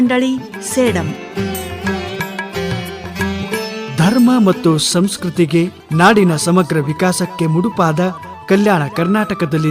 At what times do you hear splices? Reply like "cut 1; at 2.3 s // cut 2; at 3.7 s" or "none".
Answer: cut 1; at 5.8 s